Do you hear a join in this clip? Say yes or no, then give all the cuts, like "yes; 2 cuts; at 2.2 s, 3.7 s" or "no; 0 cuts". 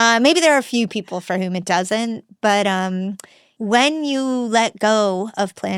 yes; 1 cut; at 3.5 s